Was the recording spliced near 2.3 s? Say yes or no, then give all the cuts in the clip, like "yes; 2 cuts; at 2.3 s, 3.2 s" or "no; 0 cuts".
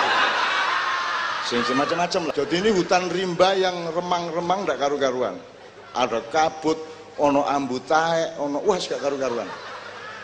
yes; 1 cut; at 2.3 s